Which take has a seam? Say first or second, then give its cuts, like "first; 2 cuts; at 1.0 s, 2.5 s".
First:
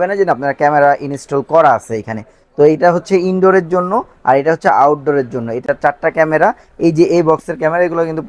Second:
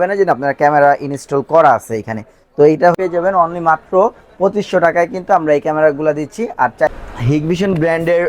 second; 2 cuts; at 3.0 s, 6.9 s